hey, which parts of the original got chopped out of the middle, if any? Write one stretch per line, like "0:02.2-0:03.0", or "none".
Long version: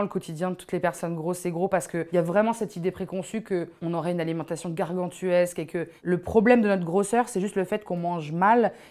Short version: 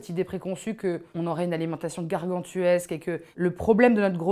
none